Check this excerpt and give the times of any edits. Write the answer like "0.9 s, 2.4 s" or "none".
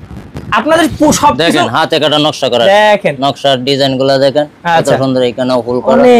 none

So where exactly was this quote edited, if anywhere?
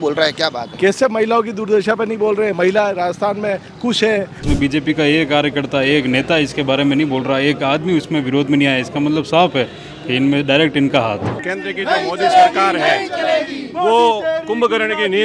4.4 s, 11.5 s

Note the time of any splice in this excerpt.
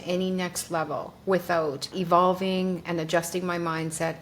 1.9 s

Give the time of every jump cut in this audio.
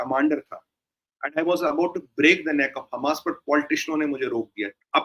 none

